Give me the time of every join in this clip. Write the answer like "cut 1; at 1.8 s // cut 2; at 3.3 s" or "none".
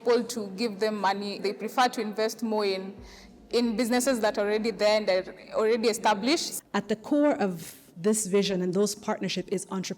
cut 1; at 1.4 s // cut 2; at 6.5 s